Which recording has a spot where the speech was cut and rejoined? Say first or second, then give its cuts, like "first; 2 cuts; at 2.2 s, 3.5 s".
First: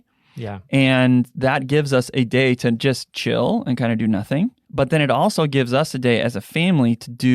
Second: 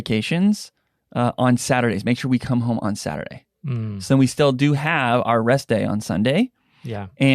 first; 1 cut; at 4.6 s